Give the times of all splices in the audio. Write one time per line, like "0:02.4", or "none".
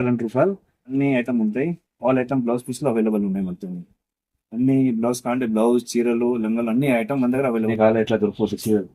0:00.9
0:07.7